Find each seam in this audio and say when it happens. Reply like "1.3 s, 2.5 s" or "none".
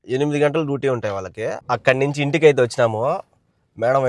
1.6 s